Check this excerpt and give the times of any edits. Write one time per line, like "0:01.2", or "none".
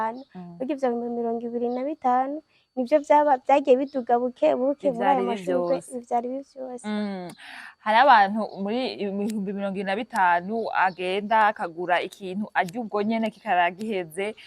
none